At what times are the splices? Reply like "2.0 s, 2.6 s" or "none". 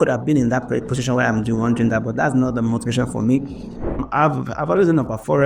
4.0 s